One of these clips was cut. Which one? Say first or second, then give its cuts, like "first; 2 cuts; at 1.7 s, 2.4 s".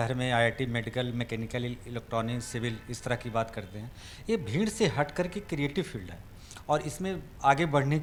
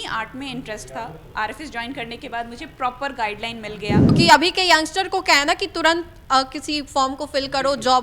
second; 1 cut; at 4.1 s